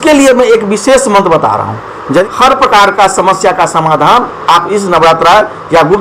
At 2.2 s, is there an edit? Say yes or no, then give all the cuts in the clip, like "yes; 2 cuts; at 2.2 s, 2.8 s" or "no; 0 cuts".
yes; 1 cut; at 2.2 s